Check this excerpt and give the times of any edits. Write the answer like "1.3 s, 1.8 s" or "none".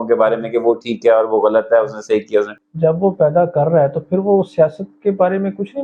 2.6 s